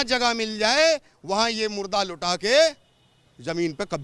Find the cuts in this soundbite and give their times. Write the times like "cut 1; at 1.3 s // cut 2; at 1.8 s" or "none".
none